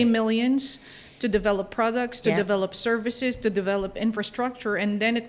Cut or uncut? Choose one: uncut